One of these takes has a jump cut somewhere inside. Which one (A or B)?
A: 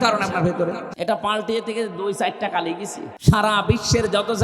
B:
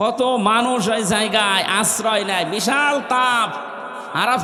A